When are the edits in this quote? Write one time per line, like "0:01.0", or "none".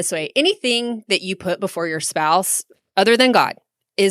0:02.7